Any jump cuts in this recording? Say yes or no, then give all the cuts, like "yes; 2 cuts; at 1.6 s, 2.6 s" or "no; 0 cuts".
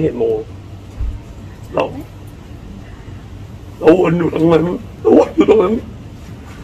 yes; 1 cut; at 4.8 s